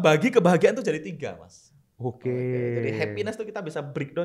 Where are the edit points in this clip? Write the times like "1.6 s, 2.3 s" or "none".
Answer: none